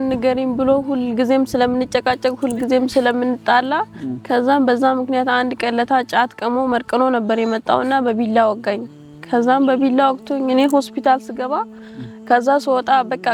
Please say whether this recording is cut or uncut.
uncut